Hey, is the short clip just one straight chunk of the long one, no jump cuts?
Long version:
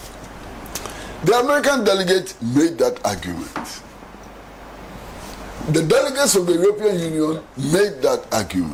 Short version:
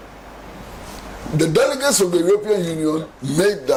yes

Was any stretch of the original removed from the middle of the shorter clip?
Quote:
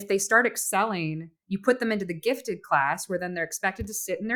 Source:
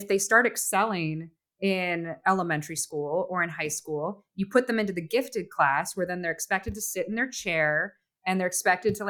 yes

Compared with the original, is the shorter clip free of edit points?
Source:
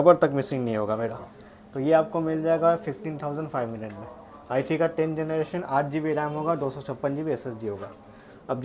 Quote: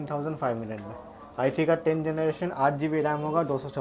yes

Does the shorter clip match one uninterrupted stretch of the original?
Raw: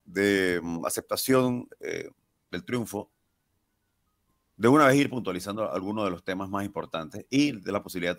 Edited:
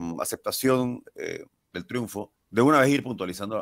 no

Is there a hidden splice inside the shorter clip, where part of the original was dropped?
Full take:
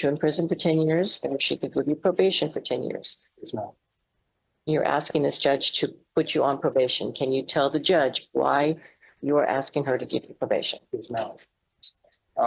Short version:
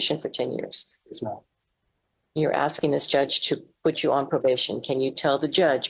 no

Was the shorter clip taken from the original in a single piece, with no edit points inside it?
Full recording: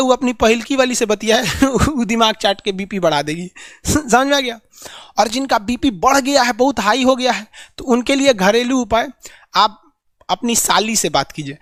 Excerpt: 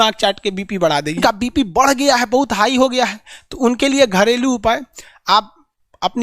no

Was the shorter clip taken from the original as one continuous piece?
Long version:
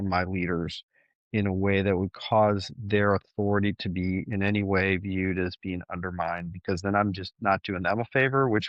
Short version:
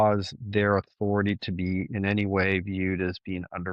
yes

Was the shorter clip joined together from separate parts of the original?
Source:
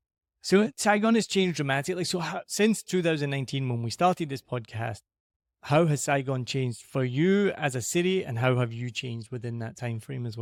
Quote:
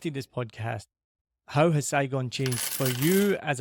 no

